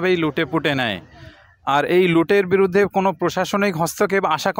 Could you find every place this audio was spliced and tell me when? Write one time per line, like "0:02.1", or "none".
none